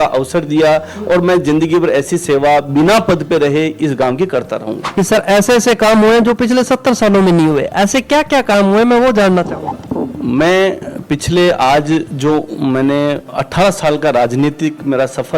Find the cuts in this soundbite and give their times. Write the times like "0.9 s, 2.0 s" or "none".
4.8 s